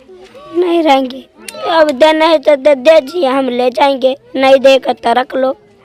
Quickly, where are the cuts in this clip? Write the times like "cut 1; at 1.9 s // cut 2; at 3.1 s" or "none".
none